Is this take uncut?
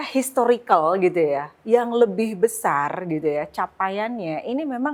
yes; 0 cuts

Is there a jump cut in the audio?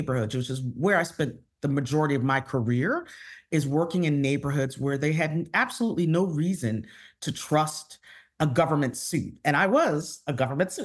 no; 0 cuts

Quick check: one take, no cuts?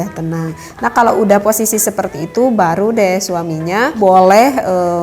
no; 1 cut; at 4.0 s

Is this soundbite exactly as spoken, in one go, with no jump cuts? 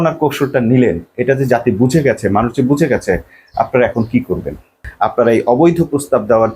no; 1 cut; at 4.8 s

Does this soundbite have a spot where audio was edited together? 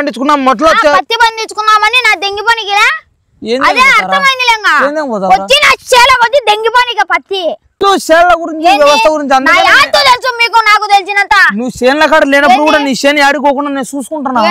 yes; 1 cut; at 7.8 s

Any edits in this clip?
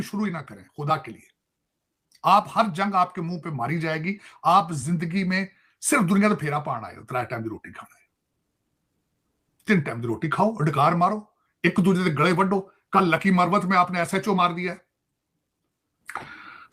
no; 0 cuts

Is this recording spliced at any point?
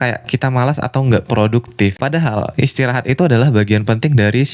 yes; 1 cut; at 2.0 s

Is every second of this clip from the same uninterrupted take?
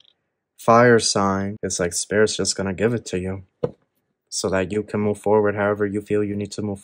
no; 1 cut; at 1.6 s

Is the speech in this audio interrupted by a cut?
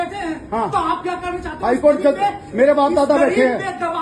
no; 0 cuts

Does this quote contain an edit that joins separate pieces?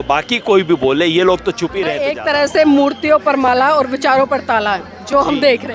yes; 1 cut; at 2.1 s

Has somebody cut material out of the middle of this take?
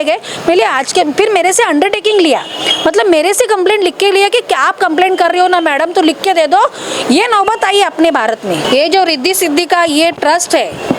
yes; 1 cut; at 8.6 s

